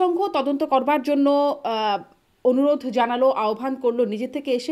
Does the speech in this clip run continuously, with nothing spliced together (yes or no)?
yes